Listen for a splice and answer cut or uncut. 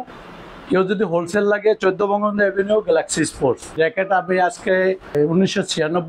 cut